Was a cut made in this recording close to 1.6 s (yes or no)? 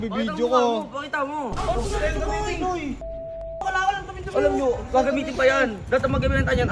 yes